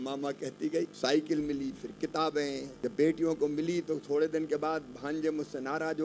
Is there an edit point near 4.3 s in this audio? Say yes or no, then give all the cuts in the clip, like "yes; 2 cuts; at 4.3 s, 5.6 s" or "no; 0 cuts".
no; 2 cuts; at 0.9 s, 2.7 s